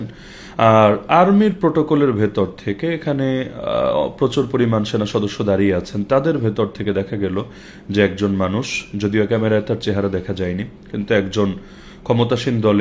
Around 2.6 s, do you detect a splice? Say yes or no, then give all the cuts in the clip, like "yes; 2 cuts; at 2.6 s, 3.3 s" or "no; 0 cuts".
no; 0 cuts